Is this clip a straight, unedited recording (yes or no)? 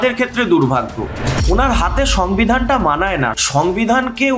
no